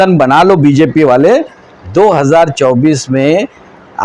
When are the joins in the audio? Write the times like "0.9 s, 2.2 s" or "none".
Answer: none